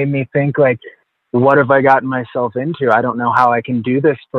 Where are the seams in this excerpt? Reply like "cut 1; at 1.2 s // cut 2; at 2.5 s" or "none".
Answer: none